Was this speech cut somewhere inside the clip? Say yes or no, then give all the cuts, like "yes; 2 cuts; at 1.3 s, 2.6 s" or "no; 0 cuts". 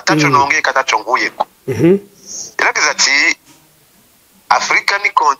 no; 0 cuts